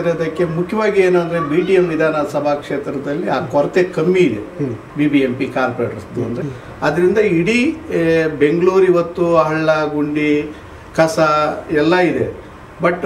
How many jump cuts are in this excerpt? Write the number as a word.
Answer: one